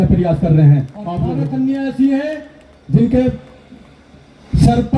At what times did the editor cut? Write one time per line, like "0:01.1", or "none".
0:01.3